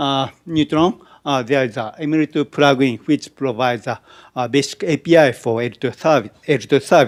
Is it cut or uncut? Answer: uncut